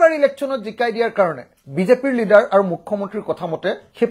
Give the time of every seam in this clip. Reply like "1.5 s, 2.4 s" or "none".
none